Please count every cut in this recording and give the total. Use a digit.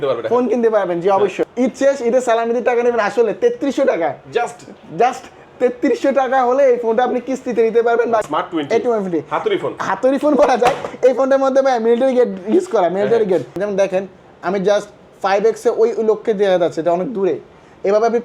3